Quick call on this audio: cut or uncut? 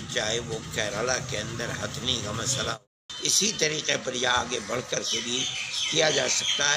cut